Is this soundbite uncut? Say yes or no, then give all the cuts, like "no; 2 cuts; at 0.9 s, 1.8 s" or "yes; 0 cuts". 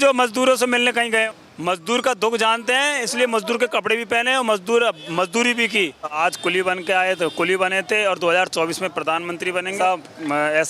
no; 3 cuts; at 1.3 s, 6.2 s, 9.8 s